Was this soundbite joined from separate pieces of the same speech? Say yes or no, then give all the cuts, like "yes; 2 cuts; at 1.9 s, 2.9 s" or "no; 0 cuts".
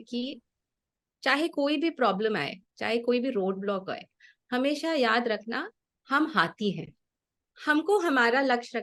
yes; 1 cut; at 7.1 s